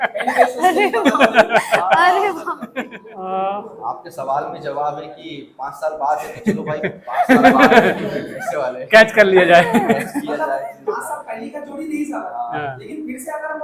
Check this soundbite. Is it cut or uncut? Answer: cut